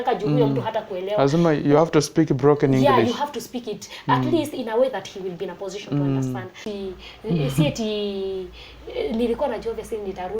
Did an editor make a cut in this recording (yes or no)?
yes